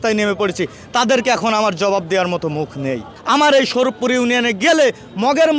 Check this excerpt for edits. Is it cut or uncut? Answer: cut